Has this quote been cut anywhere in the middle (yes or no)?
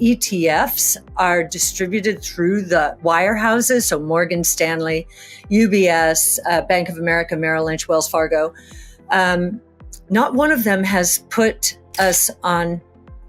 yes